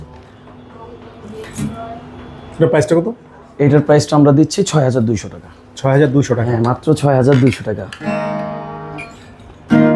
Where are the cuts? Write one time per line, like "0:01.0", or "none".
none